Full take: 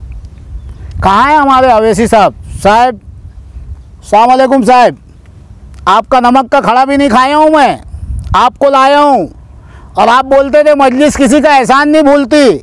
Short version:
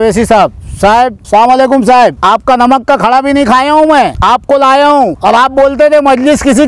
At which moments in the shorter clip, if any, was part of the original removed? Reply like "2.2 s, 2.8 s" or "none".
1.2 s, 2.2 s, 4.2 s, 5.2 s